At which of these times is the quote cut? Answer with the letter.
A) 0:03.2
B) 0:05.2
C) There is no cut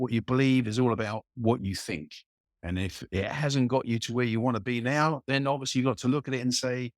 C